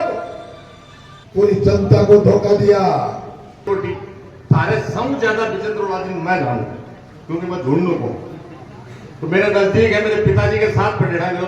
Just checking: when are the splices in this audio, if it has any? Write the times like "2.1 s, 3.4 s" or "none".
3.7 s